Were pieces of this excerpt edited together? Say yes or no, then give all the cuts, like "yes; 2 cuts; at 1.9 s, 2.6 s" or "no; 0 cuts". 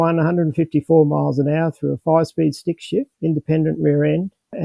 yes; 1 cut; at 3.1 s